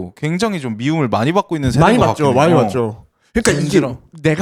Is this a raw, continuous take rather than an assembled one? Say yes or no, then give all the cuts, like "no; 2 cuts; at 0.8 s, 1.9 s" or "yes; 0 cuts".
yes; 0 cuts